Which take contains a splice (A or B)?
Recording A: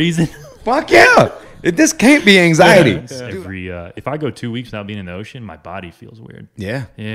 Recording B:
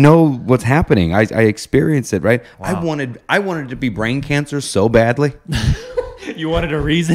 A